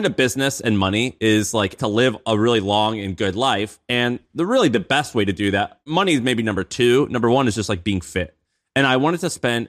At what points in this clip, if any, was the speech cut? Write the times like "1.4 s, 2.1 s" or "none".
1.8 s, 5.9 s

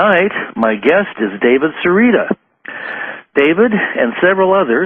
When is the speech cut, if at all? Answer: 2.2 s

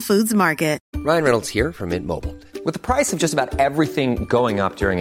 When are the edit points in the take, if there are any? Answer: 0.9 s

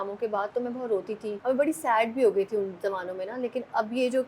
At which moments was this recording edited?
1.4 s

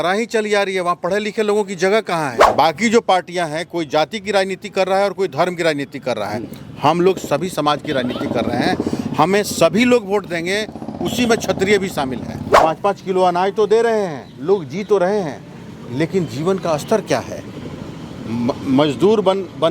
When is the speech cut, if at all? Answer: 2.4 s, 12.4 s

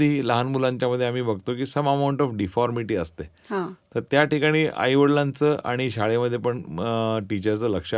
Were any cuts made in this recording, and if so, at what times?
none

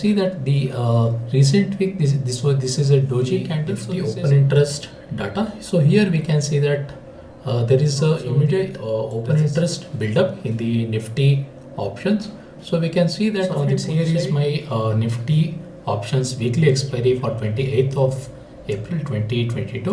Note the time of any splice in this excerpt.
3.8 s, 8.8 s, 13.8 s

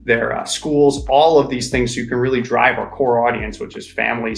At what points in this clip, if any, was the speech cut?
none

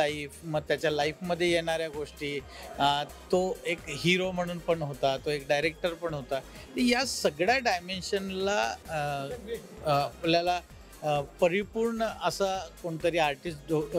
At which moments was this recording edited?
none

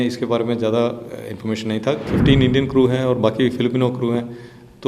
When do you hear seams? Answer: 2.1 s

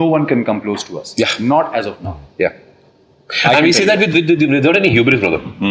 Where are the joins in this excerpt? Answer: none

